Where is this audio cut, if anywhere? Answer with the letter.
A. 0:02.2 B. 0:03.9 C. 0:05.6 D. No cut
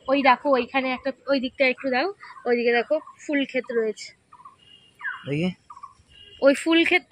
D